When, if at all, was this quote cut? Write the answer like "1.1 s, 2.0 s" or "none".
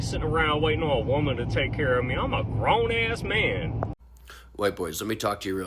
4.0 s